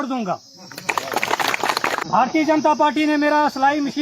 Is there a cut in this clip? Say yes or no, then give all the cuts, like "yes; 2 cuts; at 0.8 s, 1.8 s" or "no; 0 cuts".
yes; 1 cut; at 2.0 s